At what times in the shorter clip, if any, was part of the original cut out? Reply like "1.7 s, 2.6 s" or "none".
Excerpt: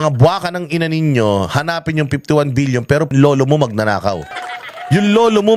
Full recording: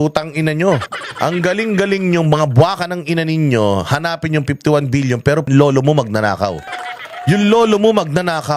none

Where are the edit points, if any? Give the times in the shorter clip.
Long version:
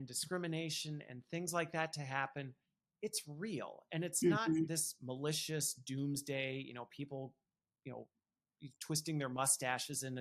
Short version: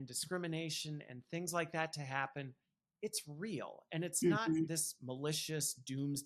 none

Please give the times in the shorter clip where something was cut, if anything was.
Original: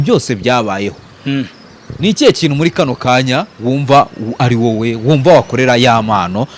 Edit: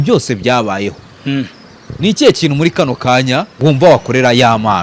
3.5 s

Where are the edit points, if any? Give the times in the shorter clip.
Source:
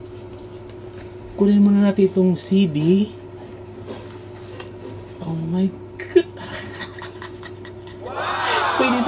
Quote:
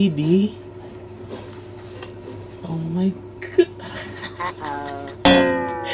none

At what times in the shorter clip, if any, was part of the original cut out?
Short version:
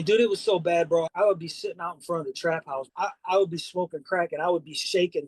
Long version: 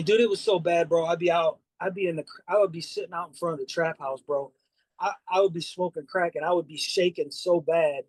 1.1 s, 2.9 s

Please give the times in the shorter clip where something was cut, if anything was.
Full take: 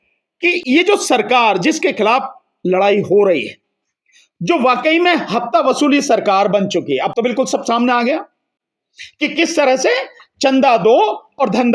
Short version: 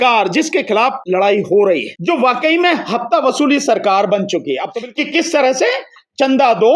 1.0 s, 1.9 s, 4.8 s

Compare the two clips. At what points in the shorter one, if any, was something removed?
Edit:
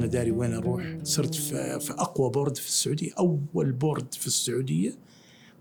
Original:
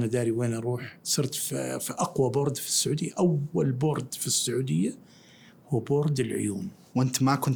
none

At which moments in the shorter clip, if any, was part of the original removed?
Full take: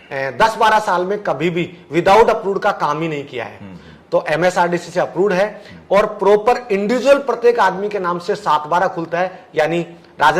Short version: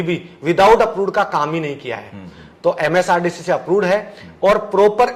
none

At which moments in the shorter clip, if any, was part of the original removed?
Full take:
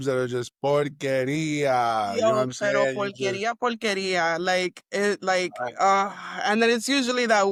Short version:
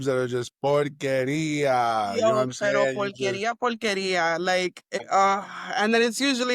4.9 s

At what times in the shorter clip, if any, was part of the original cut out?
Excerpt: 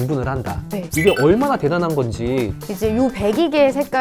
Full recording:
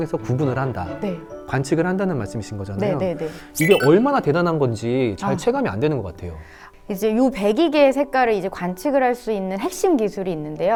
0.9 s, 2.5 s

